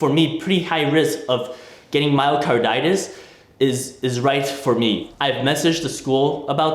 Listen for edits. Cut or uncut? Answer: cut